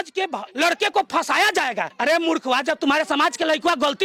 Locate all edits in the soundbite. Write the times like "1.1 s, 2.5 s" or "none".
none